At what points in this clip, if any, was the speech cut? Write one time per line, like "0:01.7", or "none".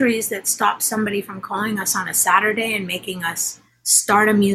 none

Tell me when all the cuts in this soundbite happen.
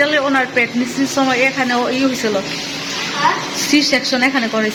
none

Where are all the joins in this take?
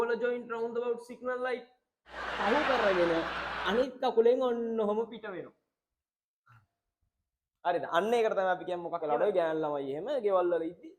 0:09.0

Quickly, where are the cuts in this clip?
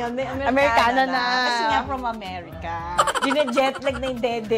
0:03.1

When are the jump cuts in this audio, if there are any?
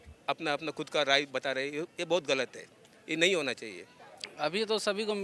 0:03.9

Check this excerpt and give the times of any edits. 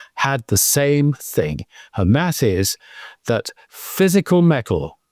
none

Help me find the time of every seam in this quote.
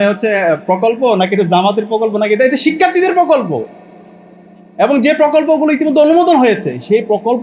none

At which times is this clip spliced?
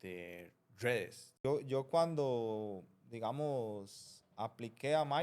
0:01.3

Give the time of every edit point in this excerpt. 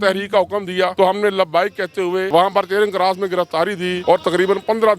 0:00.9
0:02.3
0:04.0

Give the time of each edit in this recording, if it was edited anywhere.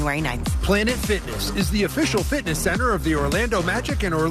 none

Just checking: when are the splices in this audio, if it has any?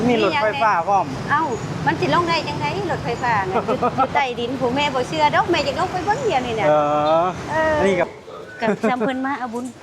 0:08.1

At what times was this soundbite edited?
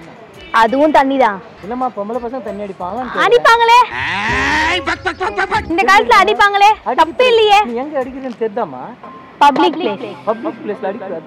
0:01.5

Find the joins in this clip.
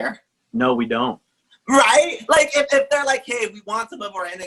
none

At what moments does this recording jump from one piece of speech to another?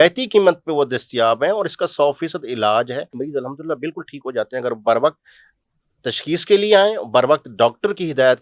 0:03.2

